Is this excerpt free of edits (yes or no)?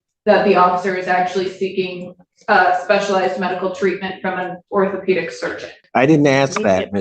no